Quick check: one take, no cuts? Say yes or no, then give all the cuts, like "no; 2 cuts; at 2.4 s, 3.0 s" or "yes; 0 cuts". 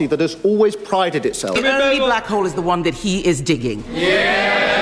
no; 1 cut; at 1.5 s